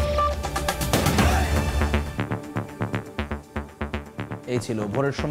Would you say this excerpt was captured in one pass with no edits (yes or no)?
yes